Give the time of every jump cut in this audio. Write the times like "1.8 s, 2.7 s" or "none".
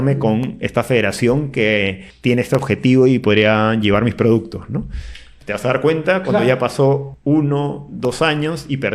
2.0 s, 7.1 s